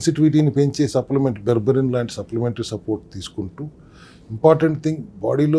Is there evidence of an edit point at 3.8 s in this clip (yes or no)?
no